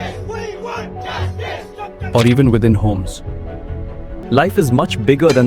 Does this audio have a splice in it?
yes; 1 cut; at 4.2 s

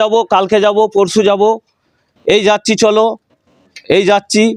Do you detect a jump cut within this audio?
no; 0 cuts

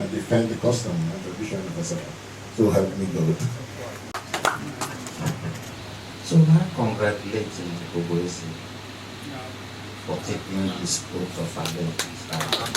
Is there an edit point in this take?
yes; 1 cut; at 5.8 s

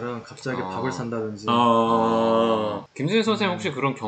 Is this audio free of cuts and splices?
yes; 0 cuts

